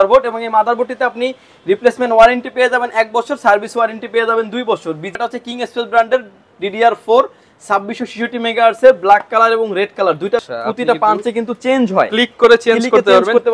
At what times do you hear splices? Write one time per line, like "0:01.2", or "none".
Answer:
0:05.1
0:10.5